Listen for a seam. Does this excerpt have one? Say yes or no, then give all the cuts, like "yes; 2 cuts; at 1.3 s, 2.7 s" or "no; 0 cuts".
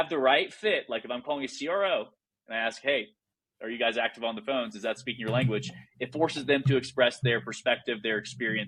no; 0 cuts